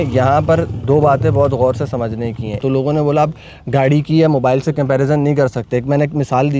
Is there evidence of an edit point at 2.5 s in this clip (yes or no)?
yes